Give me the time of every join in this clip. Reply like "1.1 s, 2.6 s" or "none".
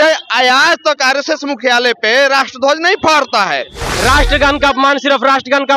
3.8 s

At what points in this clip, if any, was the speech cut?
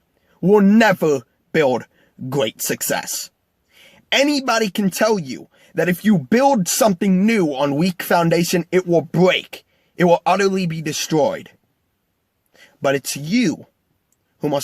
3.0 s

